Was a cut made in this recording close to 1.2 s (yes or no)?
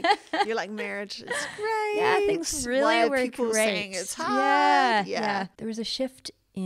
no